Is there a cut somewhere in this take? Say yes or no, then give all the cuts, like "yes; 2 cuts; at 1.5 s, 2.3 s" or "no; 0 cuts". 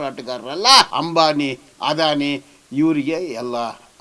yes; 1 cut; at 0.9 s